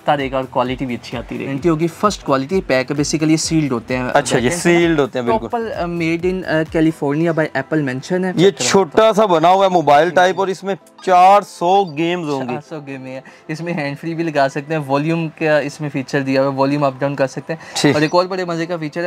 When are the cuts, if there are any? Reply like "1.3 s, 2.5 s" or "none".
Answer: 1.5 s, 8.3 s